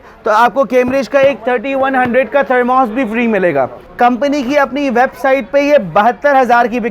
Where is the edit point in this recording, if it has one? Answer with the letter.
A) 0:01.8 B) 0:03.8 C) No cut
B